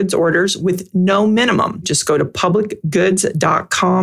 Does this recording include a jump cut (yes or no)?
yes